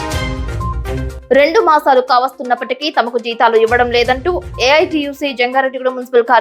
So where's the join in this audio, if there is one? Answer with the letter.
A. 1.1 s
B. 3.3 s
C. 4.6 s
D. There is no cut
D